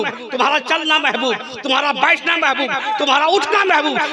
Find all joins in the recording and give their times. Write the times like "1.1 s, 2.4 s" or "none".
none